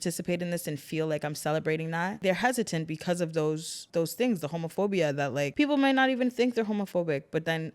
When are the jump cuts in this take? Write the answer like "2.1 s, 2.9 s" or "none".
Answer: 2.2 s, 3.8 s, 5.5 s